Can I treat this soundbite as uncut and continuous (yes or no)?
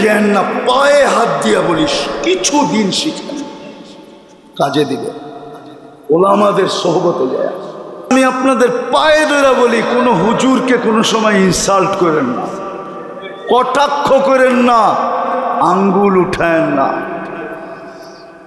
no